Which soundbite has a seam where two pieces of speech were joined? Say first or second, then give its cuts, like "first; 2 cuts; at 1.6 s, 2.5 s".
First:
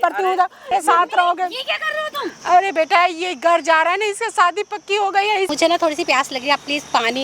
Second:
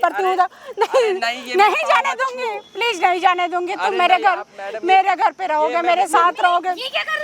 first; 3 cuts; at 0.7 s, 2.3 s, 5.5 s